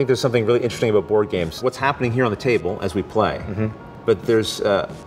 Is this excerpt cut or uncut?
cut